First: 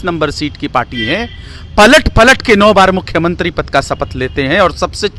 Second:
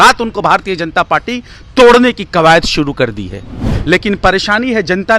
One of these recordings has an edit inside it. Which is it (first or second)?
second